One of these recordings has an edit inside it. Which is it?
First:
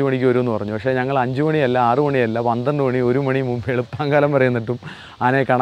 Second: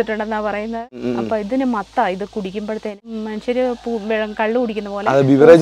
second; 2 cuts; at 1.0 s, 3.0 s

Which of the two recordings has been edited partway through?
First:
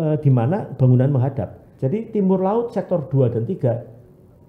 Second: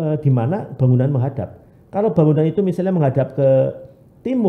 first; 1 cut; at 1.6 s

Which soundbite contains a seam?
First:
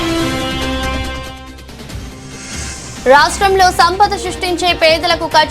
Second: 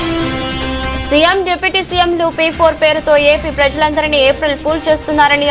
first; 1 cut; at 0.9 s

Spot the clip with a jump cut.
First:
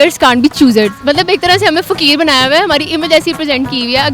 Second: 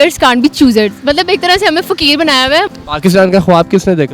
second; 1 cut; at 2.7 s

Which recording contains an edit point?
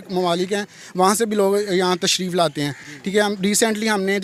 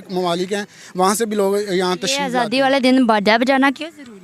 second; 1 cut; at 2.3 s

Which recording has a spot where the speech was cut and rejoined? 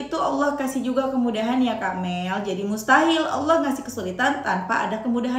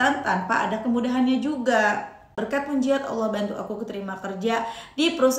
second; 1 cut; at 2.4 s

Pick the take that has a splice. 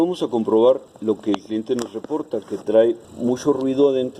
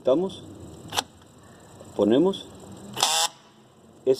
first; 2 cuts; at 0.9 s, 3.1 s

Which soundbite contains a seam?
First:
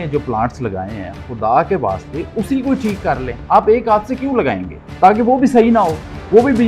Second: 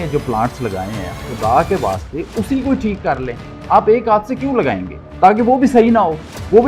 first; 1 cut; at 3.3 s

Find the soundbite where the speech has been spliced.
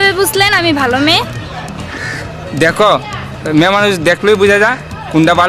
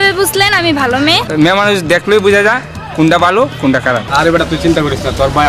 second; 2 cuts; at 1.3 s, 4.0 s

